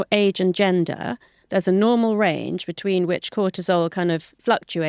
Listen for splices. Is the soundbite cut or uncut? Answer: uncut